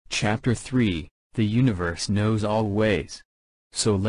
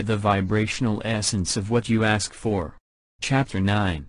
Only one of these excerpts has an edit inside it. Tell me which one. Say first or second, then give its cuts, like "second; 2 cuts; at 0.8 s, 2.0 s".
second; 1 cut; at 2.8 s